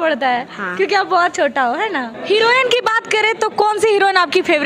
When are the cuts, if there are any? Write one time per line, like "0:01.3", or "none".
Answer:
0:02.1